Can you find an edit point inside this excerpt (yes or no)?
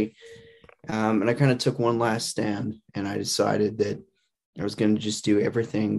no